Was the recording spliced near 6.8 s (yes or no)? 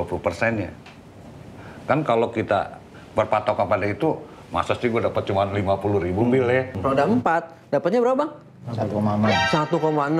yes